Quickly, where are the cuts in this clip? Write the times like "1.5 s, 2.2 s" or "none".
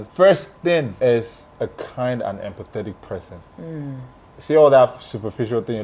0.9 s